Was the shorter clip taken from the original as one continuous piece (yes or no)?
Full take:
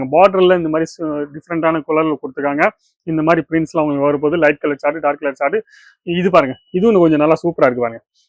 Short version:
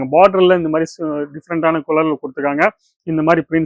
yes